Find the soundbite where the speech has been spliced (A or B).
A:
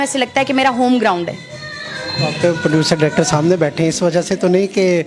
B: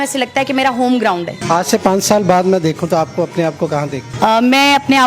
B